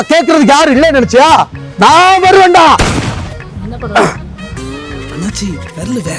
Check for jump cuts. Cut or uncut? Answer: uncut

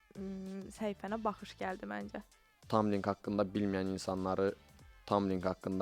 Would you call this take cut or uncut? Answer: cut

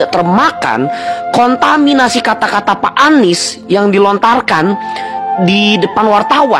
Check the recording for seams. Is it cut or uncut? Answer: uncut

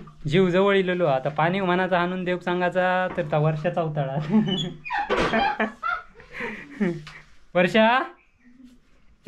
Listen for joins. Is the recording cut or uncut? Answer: uncut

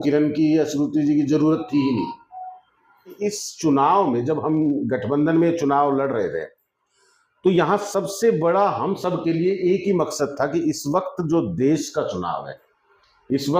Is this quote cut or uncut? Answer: cut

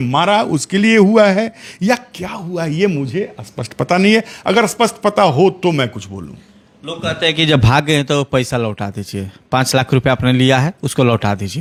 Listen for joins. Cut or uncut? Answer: uncut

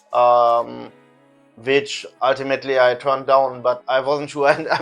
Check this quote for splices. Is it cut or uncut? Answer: cut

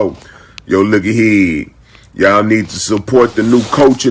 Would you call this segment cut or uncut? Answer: uncut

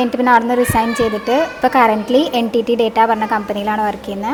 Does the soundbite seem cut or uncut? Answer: uncut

